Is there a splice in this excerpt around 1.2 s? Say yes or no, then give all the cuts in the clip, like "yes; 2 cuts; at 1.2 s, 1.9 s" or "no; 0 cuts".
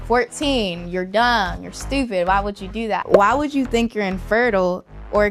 no; 1 cut; at 3.1 s